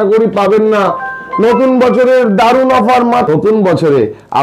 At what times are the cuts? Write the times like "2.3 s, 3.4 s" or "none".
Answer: 3.3 s